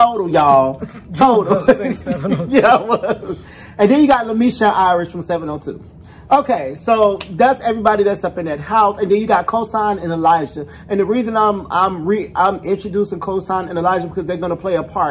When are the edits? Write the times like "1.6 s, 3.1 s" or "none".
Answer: none